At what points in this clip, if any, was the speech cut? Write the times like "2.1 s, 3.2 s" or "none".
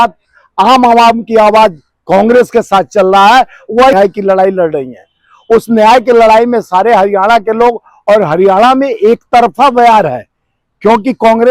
3.9 s